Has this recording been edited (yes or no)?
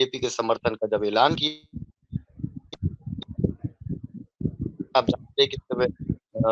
no